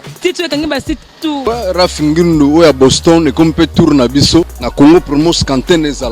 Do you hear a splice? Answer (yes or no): yes